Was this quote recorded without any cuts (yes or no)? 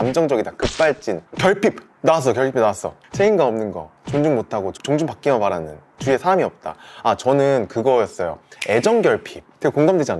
yes